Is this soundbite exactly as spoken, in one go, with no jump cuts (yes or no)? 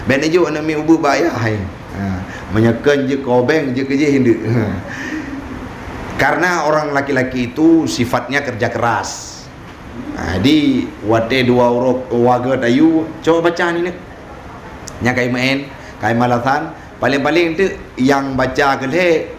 yes